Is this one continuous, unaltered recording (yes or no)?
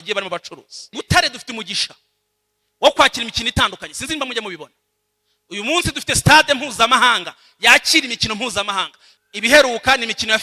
no